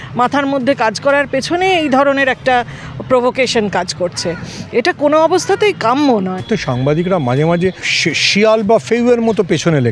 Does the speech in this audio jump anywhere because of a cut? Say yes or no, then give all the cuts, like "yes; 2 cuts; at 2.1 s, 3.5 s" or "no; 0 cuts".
yes; 2 cuts; at 6.4 s, 7.9 s